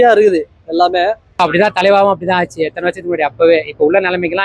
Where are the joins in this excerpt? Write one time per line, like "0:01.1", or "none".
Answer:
0:01.4

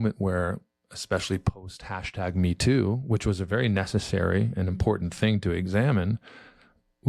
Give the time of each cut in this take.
none

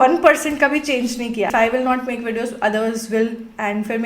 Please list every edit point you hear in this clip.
0:01.5

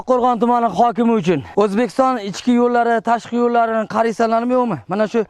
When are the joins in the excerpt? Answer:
0:01.5

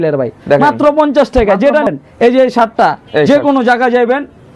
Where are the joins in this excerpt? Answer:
0:01.9

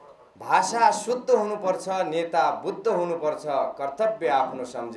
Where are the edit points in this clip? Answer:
none

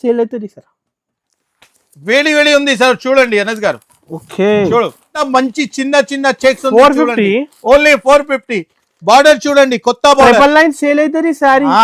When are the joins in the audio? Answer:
0:05.2

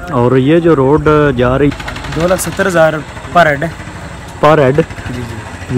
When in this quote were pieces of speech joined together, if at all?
0:01.7

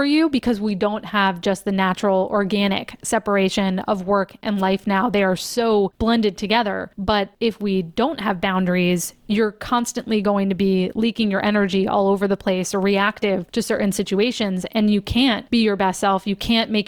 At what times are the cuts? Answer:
0:05.9
0:07.1
0:13.5
0:15.4

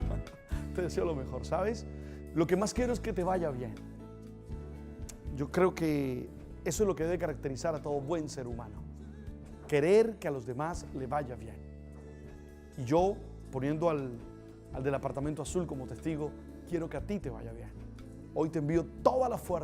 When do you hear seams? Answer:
0:05.5

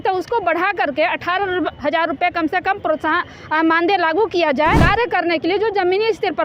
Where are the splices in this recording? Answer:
0:04.8

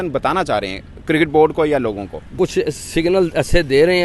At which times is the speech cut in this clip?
0:02.4

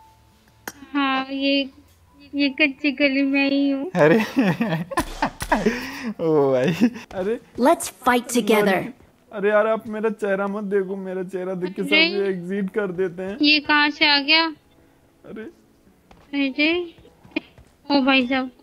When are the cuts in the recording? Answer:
0:07.1

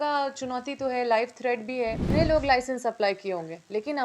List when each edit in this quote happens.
0:02.1

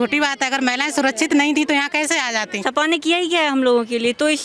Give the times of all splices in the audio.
0:02.6

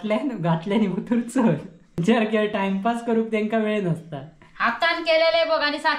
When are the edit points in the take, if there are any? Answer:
0:02.0

